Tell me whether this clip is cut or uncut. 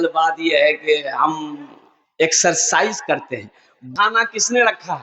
cut